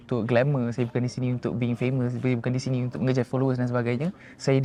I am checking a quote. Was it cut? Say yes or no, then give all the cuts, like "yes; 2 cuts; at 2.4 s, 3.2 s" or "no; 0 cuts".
no; 0 cuts